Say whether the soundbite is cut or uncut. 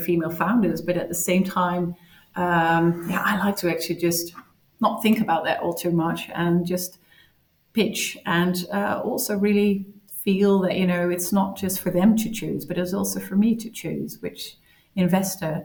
uncut